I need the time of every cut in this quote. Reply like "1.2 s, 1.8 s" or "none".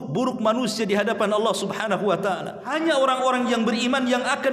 2.7 s